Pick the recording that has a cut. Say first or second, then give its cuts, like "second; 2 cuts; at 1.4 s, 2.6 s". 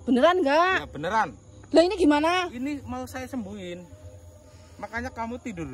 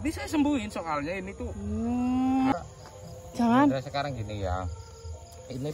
second; 1 cut; at 2.5 s